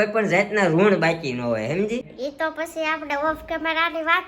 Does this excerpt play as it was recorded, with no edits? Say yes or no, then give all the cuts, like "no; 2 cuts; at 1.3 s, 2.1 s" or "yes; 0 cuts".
no; 1 cut; at 2.1 s